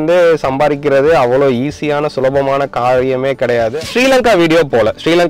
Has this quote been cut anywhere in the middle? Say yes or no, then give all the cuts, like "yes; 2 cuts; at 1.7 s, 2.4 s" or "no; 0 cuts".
yes; 1 cut; at 3.7 s